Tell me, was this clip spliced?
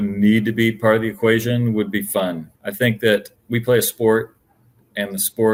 no; 0 cuts

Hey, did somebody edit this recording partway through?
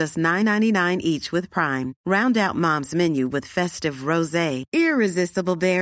no; 0 cuts

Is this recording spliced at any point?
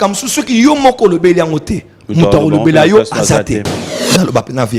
yes; 1 cut; at 3.8 s

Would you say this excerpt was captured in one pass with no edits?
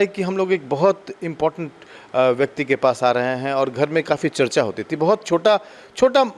yes; 0 cuts

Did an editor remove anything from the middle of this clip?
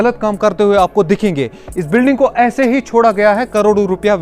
no; 0 cuts

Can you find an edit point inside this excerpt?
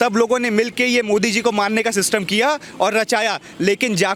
no; 0 cuts

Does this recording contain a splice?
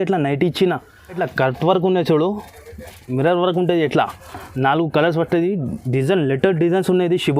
yes; 1 cut; at 1.2 s

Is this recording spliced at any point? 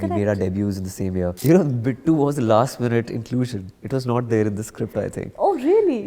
yes; 1 cut; at 1.4 s

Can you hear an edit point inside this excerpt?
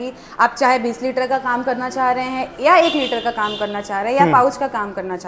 no; 0 cuts

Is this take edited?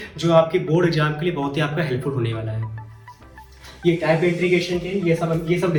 no; 0 cuts

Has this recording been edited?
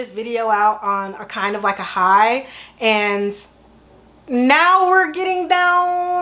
no; 0 cuts

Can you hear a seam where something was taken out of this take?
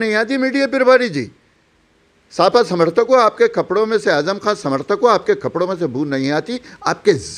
no; 0 cuts

